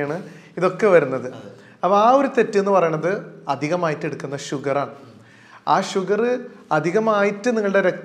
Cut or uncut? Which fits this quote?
uncut